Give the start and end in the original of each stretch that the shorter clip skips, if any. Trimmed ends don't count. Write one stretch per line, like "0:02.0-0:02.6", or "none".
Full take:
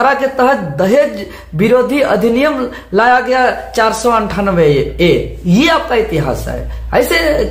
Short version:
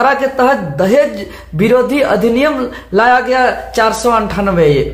none